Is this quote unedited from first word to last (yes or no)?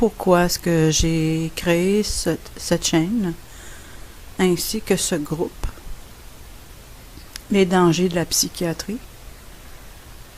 no